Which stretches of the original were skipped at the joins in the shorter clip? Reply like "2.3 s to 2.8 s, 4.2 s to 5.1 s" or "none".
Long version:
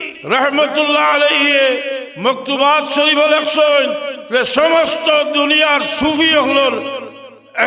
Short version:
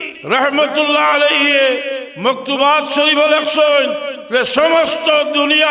none